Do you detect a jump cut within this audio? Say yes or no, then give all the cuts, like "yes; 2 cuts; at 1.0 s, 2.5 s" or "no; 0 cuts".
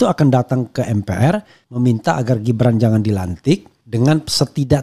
yes; 1 cut; at 1.6 s